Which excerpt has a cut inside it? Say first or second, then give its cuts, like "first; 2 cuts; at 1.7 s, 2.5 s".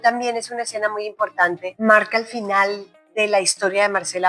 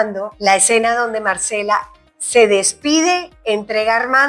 first; 1 cut; at 1.7 s